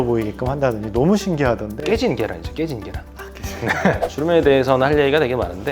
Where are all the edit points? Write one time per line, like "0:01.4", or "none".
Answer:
0:04.0